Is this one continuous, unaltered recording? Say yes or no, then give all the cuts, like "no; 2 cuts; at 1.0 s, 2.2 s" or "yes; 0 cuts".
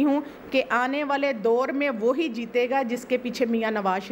yes; 0 cuts